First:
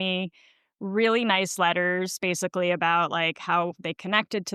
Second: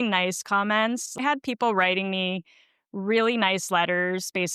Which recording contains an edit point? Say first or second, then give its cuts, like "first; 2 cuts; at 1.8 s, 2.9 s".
second; 1 cut; at 1.2 s